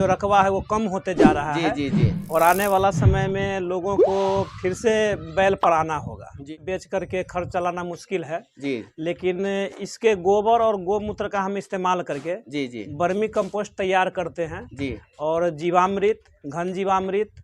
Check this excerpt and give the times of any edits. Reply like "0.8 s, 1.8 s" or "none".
6.5 s